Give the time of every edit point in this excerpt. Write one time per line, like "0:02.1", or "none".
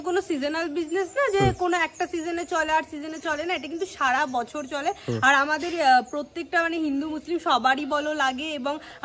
none